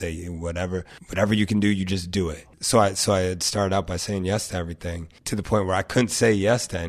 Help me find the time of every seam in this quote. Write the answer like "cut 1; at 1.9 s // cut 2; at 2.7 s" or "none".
cut 1; at 1.0 s // cut 2; at 2.5 s // cut 3; at 5.1 s